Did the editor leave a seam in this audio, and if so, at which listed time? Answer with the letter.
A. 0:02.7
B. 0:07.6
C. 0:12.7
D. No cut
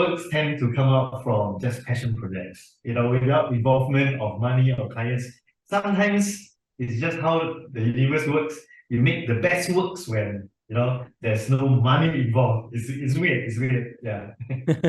D